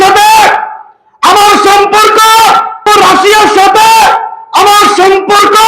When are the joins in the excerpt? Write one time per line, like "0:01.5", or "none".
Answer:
0:02.8